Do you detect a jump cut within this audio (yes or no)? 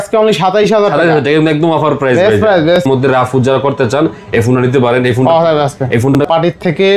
yes